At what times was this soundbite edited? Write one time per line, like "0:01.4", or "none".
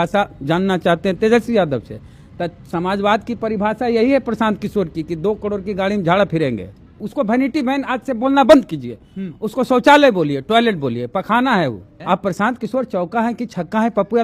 0:07.0
0:11.9